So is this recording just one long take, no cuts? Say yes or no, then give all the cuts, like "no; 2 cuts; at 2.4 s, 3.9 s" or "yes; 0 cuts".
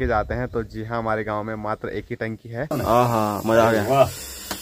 no; 1 cut; at 2.8 s